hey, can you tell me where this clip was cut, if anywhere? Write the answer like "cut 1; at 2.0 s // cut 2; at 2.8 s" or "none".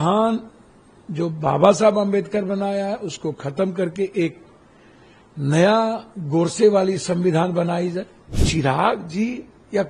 cut 1; at 8.4 s

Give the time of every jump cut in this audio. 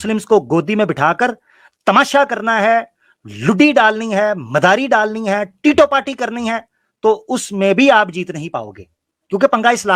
none

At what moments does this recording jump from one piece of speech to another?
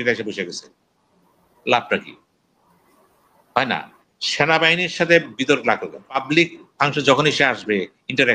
cut 1; at 6.2 s

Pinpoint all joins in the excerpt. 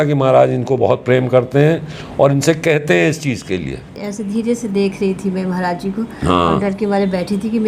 cut 1; at 4.1 s

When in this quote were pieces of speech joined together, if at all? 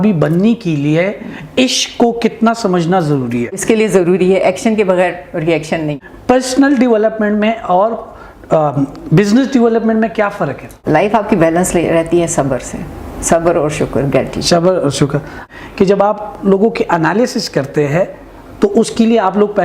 cut 1; at 3.6 s // cut 2; at 6.0 s // cut 3; at 10.7 s // cut 4; at 15.4 s

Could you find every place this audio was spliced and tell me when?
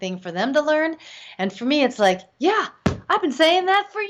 none

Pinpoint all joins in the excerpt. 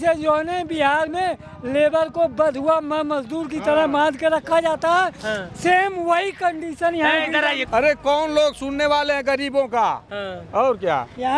cut 1; at 7.6 s

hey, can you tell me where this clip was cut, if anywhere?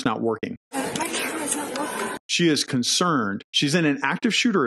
cut 1; at 2.2 s

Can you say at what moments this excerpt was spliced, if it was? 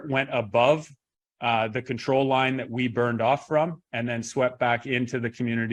none

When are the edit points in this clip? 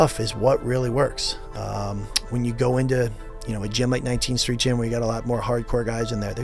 none

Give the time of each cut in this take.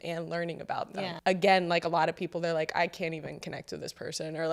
cut 1; at 1.1 s

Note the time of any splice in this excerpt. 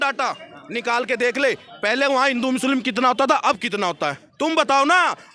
none

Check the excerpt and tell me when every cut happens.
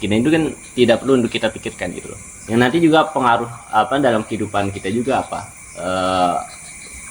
cut 1; at 2.4 s

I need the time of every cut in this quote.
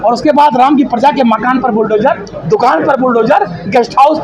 none

